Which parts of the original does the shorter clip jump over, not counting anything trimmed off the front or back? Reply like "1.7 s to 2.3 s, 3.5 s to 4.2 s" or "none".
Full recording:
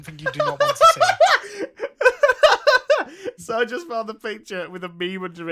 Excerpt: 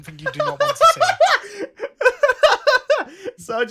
none